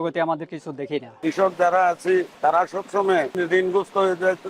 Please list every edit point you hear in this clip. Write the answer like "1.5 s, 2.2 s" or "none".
2.3 s, 3.3 s